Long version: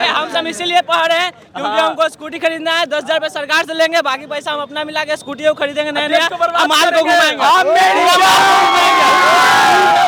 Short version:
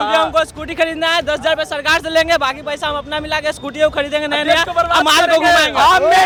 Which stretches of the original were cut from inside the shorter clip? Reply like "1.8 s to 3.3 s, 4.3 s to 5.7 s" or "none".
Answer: none